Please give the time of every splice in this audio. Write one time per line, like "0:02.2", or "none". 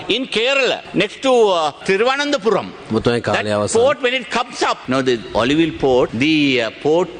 0:00.8
0:01.8
0:04.8
0:06.1